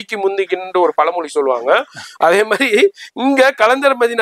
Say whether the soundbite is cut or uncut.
uncut